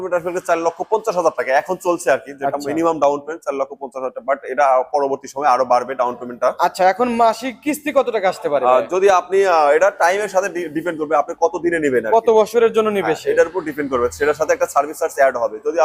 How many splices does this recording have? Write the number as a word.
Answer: zero